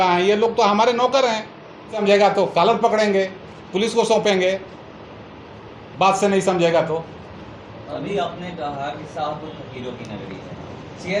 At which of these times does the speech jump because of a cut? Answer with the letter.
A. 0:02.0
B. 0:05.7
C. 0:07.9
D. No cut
A